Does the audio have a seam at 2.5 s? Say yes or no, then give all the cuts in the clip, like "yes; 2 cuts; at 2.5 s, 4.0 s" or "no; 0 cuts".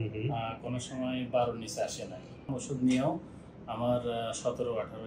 yes; 1 cut; at 2.5 s